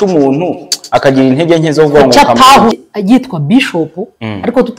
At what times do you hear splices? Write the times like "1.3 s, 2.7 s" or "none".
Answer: 2.7 s